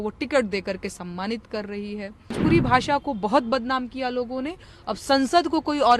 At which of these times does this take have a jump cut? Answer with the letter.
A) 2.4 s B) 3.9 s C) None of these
A